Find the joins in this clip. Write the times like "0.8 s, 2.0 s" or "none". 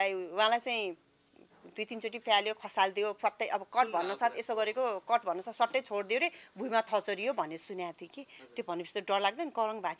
none